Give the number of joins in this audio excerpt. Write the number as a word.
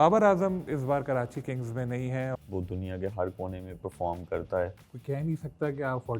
two